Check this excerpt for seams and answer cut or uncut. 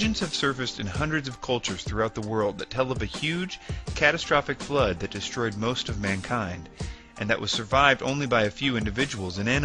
cut